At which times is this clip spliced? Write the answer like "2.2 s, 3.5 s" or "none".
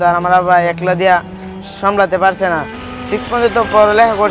2.8 s